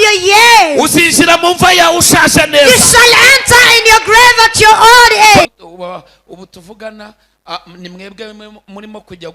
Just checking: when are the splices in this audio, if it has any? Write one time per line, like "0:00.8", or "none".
0:05.5